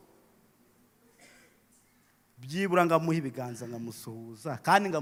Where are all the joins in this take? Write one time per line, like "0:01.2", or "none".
none